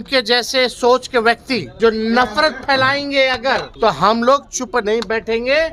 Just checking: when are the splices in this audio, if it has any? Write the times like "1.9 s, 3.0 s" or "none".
1.7 s, 3.7 s